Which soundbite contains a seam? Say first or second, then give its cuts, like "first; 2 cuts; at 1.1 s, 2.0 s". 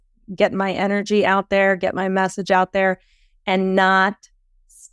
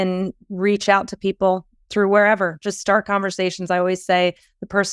second; 1 cut; at 1.7 s